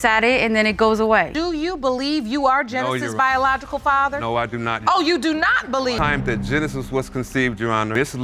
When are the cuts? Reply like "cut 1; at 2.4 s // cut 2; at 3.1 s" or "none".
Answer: cut 1; at 1.3 s